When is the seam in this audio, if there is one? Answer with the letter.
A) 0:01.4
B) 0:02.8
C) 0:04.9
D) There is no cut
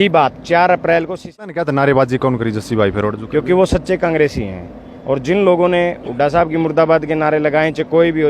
A